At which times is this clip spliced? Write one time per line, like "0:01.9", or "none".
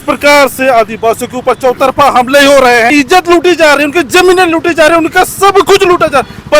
0:02.9